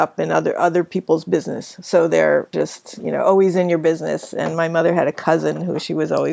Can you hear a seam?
yes; 1 cut; at 2.5 s

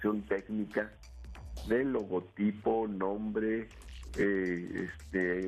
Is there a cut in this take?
yes; 1 cut; at 1.2 s

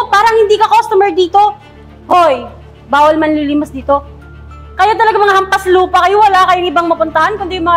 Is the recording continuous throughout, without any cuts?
no; 1 cut; at 4.2 s

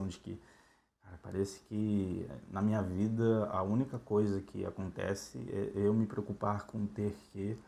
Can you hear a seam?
no; 0 cuts

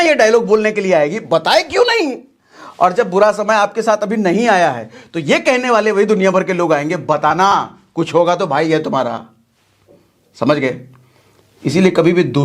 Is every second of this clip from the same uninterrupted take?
yes; 0 cuts

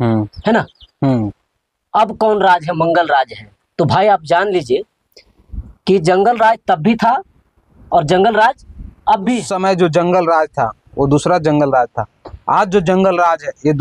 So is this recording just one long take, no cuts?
no; 1 cut; at 9.5 s

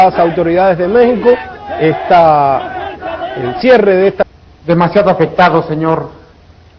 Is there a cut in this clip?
no; 0 cuts

